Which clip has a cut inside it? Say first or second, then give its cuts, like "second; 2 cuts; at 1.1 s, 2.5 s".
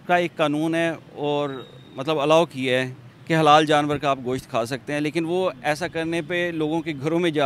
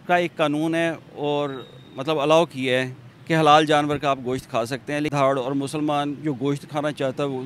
second; 1 cut; at 5.1 s